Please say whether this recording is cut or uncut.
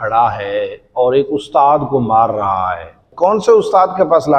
cut